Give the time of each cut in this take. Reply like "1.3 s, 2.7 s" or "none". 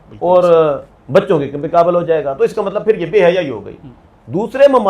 none